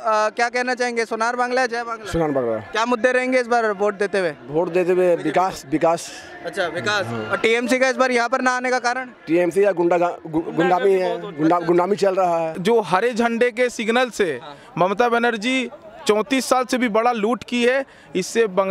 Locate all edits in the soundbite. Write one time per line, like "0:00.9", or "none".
0:12.5